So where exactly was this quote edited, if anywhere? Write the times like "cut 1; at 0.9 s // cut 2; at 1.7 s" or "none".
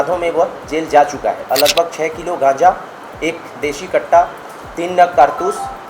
cut 1; at 1.4 s

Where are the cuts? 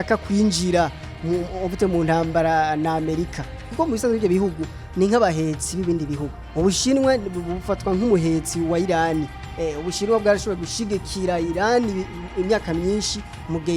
cut 1; at 3.6 s // cut 2; at 9.4 s

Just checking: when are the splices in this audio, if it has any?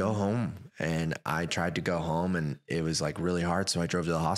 none

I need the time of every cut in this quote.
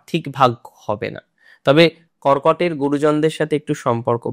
cut 1; at 2.1 s

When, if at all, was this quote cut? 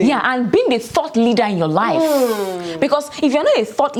none

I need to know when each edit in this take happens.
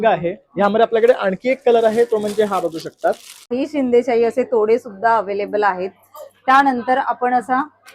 cut 1; at 3.5 s

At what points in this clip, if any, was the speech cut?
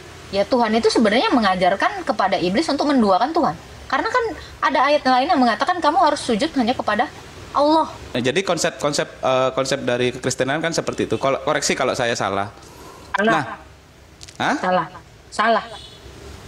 cut 1; at 8.1 s

